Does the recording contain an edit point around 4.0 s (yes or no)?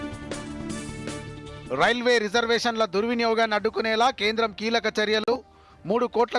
no